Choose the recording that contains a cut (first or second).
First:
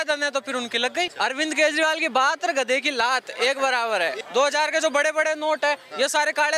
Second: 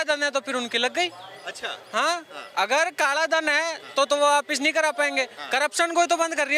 first